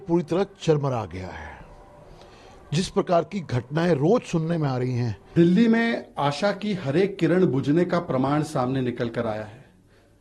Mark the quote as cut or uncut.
cut